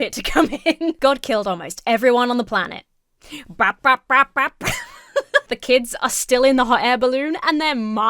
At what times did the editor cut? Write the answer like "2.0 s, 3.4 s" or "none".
5.5 s

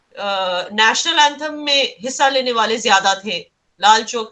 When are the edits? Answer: none

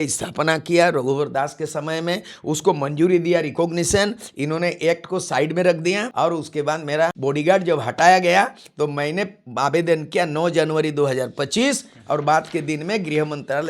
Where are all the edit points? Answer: 6.1 s, 7.2 s

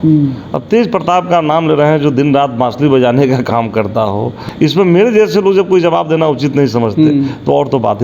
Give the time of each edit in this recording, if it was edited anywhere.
4.4 s

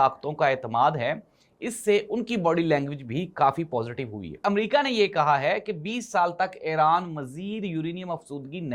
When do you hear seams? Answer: 4.4 s

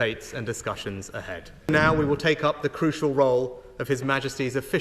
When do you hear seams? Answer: 1.7 s

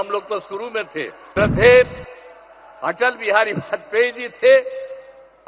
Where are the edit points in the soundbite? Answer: 1.2 s

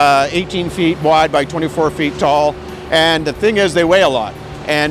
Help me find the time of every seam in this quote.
none

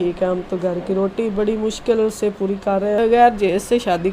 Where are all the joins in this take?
3.0 s

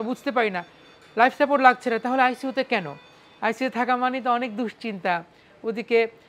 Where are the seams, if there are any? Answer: none

